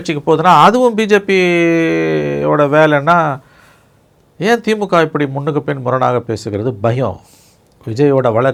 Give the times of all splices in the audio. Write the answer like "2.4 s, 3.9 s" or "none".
none